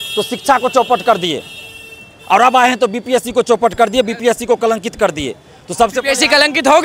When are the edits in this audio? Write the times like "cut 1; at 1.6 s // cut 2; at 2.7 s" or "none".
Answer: none